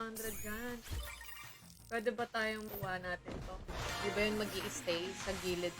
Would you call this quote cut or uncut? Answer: cut